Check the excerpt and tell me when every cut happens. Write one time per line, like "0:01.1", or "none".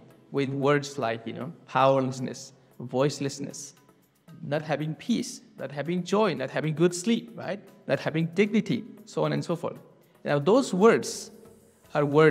none